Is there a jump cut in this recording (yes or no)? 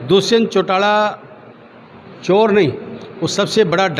no